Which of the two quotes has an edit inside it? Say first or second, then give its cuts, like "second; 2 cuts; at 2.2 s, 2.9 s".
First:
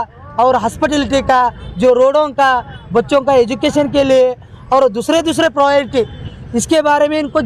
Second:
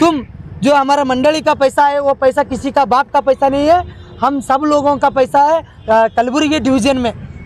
second; 1 cut; at 5.7 s